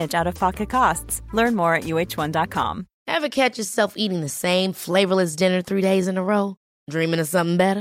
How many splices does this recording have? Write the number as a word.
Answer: one